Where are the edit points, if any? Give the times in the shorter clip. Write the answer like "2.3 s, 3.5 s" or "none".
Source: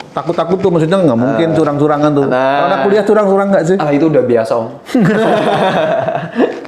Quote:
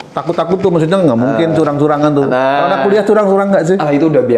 none

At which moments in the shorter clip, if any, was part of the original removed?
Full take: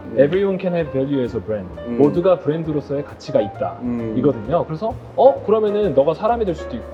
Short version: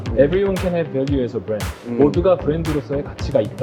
none

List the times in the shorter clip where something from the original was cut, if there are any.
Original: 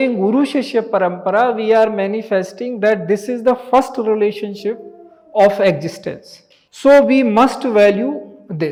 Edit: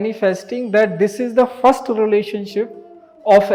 none

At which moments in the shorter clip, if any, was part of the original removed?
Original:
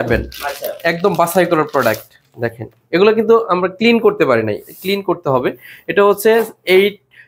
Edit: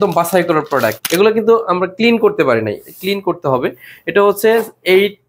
1.0 s

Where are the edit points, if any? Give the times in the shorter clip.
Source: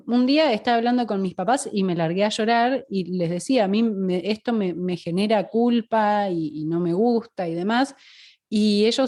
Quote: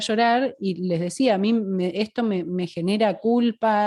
none

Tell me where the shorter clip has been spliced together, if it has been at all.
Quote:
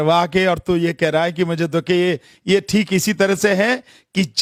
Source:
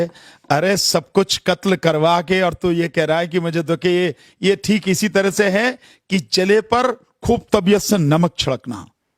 none

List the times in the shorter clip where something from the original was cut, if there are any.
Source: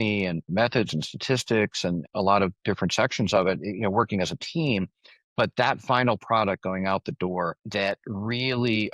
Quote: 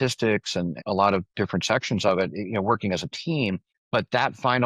3.7 s

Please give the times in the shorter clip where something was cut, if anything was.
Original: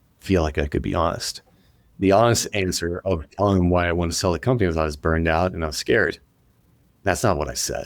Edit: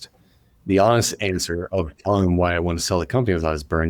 none

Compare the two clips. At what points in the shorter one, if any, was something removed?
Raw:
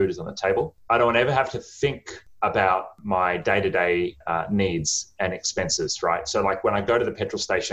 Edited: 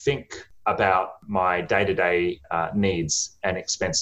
none

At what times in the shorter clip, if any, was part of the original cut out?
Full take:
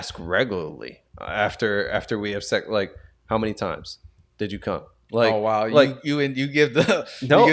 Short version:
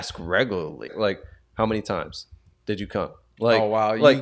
0.9 s

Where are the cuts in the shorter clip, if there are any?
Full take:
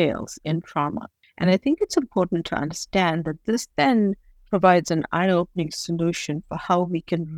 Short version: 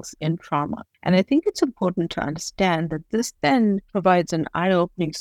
0.9 s, 3.9 s

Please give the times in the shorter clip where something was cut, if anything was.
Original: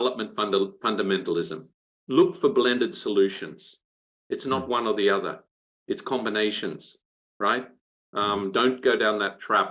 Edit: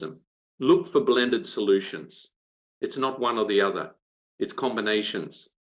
none

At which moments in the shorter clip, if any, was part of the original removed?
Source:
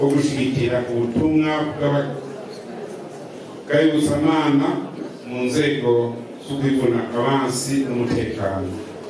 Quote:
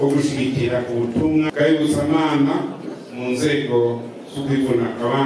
1.5 s

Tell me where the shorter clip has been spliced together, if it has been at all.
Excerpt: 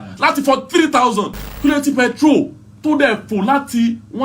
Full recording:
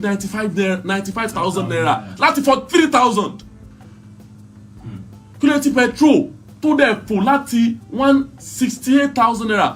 1.4 s

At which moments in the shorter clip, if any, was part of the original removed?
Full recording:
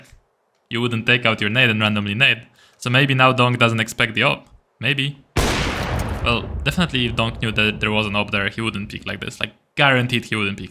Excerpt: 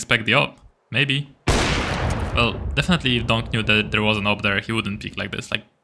none

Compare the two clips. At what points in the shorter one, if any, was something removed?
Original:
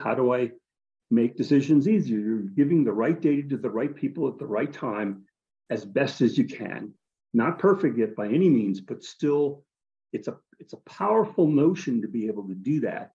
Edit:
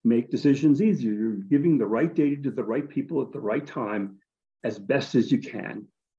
none

